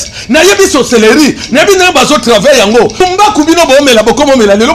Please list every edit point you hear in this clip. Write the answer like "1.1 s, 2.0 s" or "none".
3.0 s